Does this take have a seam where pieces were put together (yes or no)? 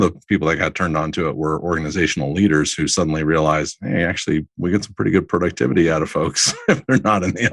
no